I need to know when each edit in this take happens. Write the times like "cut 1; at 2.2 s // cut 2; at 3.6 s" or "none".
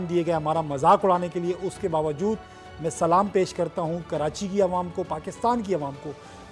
none